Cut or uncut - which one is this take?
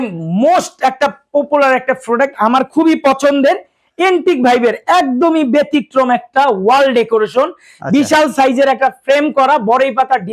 uncut